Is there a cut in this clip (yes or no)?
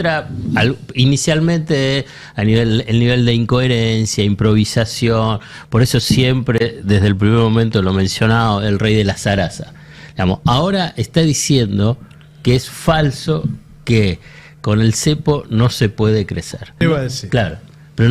yes